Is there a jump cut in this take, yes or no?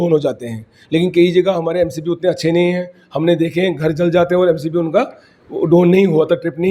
no